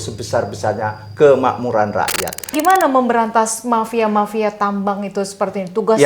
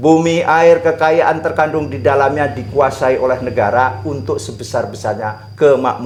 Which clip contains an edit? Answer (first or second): first